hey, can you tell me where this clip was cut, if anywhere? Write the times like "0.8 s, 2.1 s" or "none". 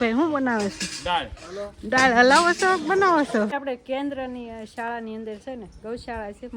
3.5 s

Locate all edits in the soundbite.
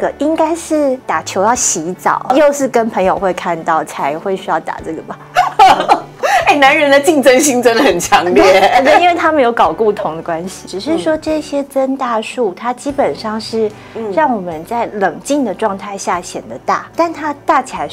1.0 s, 2.3 s, 6.2 s, 10.5 s, 16.9 s

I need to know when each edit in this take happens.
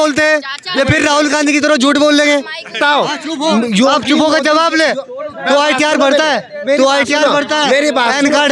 2.8 s

